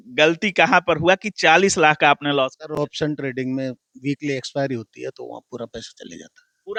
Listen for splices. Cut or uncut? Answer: uncut